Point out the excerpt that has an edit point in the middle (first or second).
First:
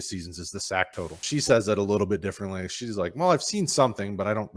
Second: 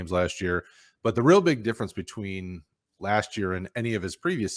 first